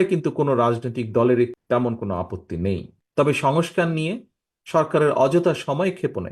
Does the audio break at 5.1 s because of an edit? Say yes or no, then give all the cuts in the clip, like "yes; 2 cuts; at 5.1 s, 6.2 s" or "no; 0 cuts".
no; 1 cut; at 1.6 s